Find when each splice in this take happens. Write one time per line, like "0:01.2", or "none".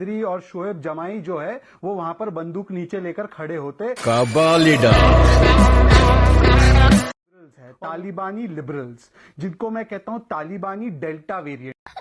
0:07.3